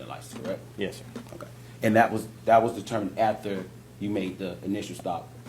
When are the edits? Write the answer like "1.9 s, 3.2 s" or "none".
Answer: none